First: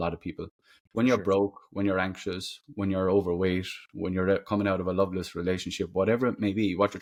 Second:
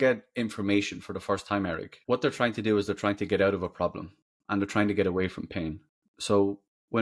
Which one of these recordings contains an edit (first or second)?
second